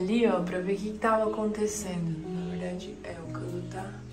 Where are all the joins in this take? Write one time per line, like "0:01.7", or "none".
none